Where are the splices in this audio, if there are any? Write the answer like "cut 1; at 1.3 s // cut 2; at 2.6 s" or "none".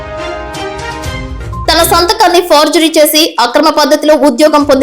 cut 1; at 1.0 s